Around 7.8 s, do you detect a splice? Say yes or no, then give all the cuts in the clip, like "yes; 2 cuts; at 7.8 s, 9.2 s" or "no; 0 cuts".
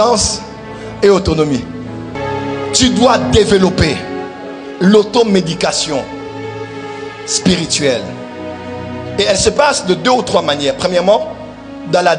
no; 1 cut; at 2.2 s